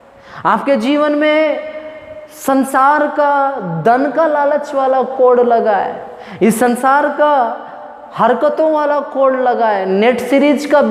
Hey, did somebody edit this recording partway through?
no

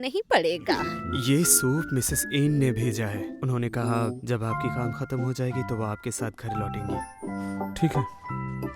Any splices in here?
yes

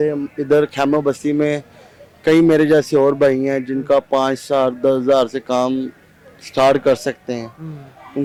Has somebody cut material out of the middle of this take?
no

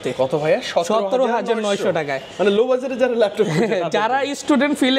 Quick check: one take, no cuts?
yes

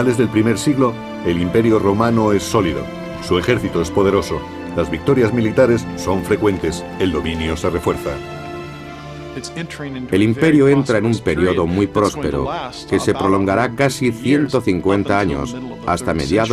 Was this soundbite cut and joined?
yes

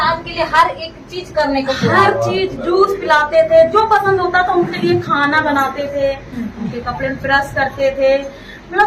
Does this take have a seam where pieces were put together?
no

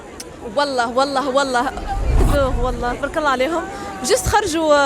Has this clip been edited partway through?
yes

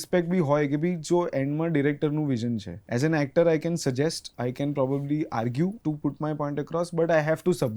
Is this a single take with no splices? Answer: no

